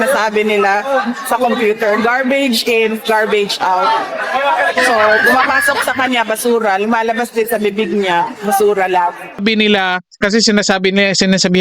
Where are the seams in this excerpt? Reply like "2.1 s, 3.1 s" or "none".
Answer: 9.4 s